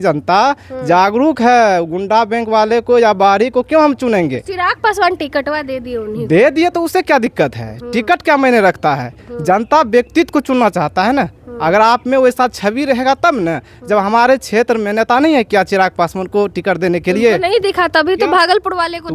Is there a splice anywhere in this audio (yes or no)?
no